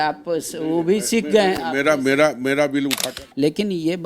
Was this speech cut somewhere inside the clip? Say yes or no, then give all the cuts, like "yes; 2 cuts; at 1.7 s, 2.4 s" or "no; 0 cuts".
yes; 1 cut; at 3.0 s